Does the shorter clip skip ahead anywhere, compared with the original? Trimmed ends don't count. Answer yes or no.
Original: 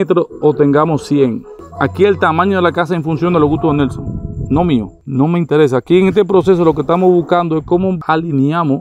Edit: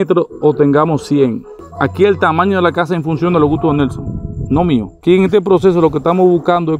yes